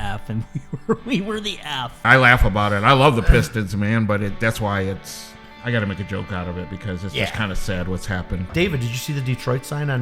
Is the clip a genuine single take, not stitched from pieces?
no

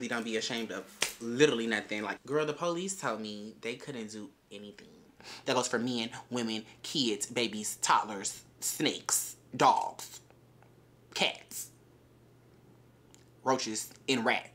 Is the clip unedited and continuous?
no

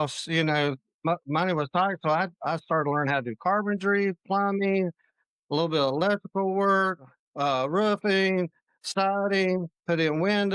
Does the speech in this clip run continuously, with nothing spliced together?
yes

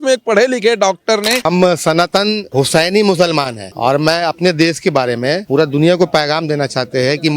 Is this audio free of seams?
no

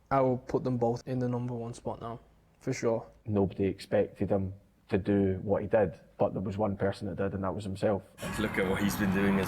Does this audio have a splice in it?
yes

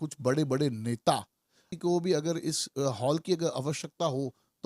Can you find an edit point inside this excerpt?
yes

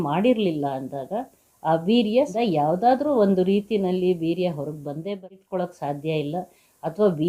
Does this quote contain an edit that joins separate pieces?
yes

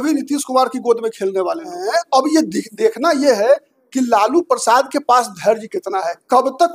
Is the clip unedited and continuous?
no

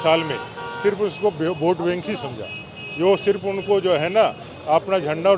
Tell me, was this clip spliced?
no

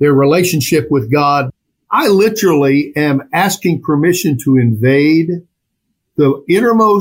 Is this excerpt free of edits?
no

